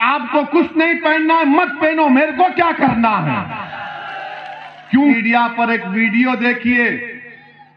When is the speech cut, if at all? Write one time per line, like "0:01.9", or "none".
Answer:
0:05.2